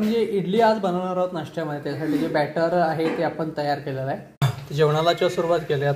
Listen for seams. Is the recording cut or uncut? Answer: cut